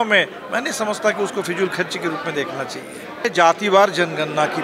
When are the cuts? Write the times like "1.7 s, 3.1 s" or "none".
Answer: 3.3 s

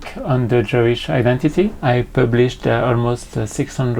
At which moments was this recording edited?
1.8 s

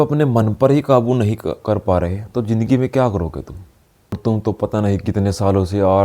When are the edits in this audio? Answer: 4.2 s

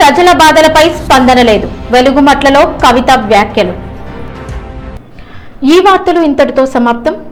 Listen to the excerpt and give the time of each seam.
none

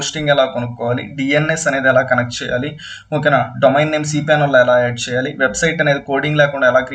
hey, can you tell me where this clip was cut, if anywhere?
none

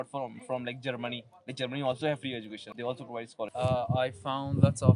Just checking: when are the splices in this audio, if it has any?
2.6 s, 3.5 s

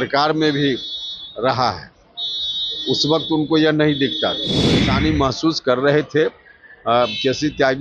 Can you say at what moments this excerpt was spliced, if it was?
4.9 s

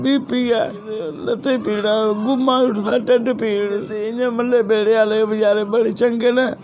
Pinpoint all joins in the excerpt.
1.1 s, 4.0 s

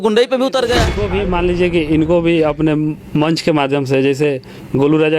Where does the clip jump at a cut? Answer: 1.0 s

